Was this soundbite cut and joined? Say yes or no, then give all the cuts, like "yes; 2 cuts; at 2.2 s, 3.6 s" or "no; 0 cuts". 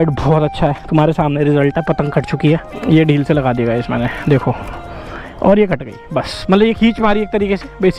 yes; 1 cut; at 2.7 s